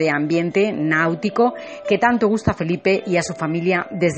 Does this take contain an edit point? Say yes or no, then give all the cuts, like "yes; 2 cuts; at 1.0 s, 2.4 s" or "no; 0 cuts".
yes; 1 cut; at 2.3 s